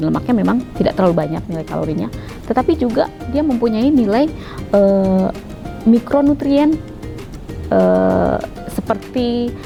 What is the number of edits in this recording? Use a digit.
0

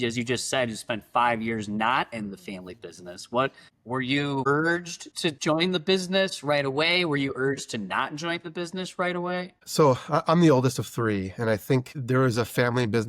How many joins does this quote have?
1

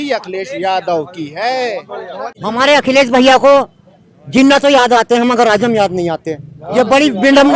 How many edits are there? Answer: 1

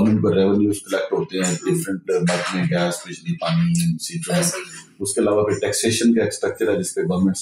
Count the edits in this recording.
0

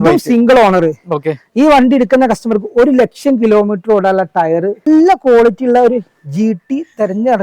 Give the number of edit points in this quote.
1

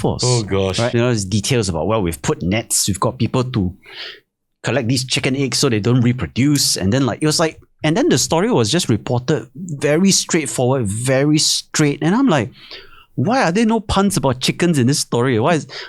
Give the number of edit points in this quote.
1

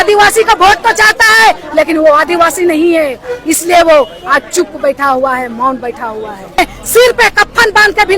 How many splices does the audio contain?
1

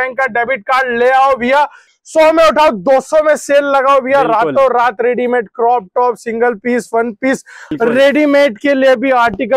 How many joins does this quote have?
2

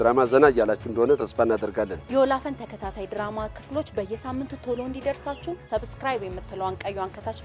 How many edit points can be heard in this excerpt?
0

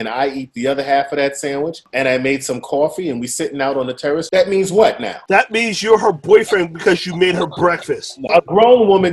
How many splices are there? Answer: 4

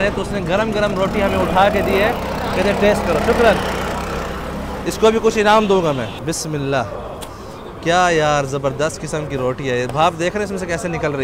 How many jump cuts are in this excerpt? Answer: 0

